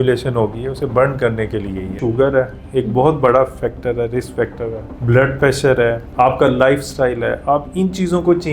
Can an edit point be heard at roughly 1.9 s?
yes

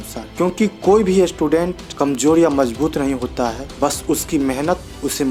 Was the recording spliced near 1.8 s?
no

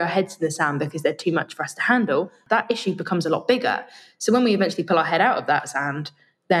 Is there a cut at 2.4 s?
yes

